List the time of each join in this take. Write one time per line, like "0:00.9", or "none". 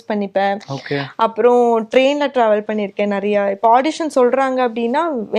none